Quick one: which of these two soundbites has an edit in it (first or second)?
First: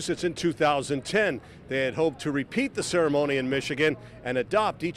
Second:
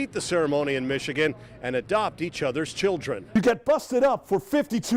second